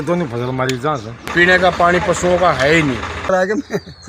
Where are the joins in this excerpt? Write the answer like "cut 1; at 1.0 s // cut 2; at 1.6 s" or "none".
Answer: cut 1; at 1.2 s // cut 2; at 3.3 s

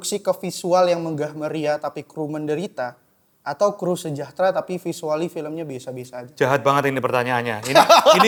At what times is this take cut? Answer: none

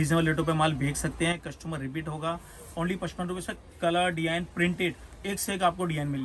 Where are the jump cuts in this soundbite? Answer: none

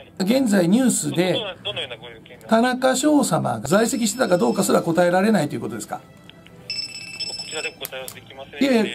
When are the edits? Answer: cut 1; at 3.6 s

